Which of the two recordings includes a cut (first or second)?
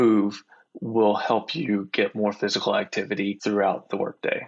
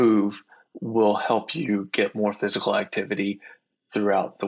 first